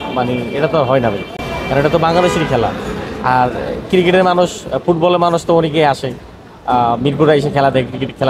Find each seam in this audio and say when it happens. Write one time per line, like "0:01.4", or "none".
none